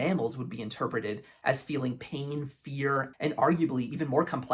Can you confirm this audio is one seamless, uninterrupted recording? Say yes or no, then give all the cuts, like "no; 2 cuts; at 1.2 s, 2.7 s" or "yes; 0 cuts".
no; 1 cut; at 3.1 s